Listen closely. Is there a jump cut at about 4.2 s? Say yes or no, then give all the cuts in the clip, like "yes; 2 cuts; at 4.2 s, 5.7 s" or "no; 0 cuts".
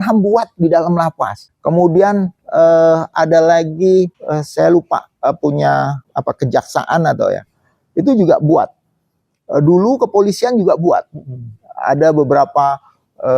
yes; 3 cuts; at 1.4 s, 4.2 s, 6.0 s